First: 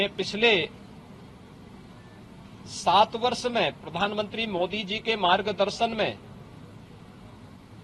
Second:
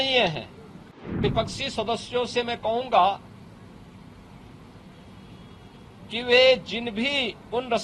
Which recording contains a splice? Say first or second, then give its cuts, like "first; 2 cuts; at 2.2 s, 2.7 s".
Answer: second; 1 cut; at 1.2 s